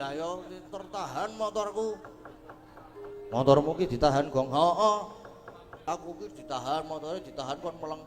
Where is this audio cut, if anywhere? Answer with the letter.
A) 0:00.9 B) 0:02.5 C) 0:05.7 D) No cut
C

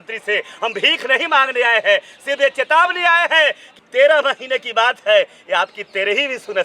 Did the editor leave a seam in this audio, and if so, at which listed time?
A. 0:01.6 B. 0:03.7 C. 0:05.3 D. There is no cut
B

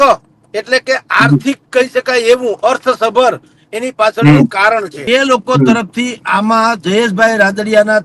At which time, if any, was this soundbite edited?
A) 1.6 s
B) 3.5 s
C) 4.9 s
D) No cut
C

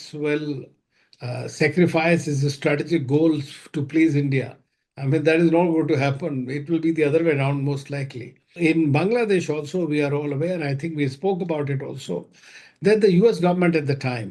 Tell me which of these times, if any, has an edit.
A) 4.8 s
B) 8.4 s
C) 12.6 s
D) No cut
B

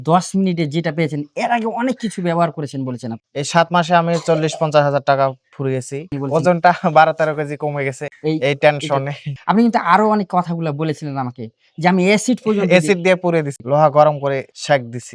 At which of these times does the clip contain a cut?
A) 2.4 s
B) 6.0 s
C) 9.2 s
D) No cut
B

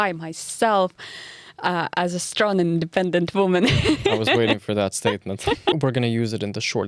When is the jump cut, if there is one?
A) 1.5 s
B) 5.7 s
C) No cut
B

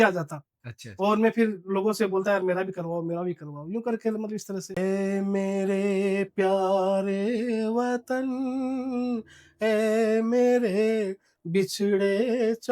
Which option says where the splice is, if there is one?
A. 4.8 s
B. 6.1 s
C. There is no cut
A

